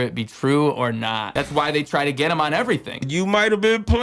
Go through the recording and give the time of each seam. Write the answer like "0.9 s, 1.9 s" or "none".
1.2 s, 3.1 s